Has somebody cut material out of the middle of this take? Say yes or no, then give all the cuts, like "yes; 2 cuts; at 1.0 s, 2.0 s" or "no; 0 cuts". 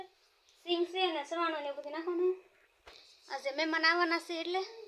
no; 0 cuts